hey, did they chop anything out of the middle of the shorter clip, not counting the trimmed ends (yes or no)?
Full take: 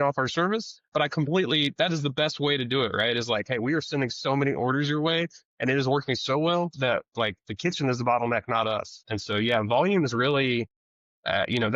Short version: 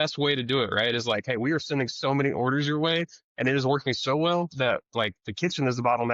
no